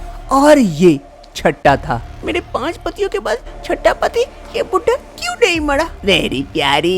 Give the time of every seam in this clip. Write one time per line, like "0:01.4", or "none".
0:02.1
0:05.9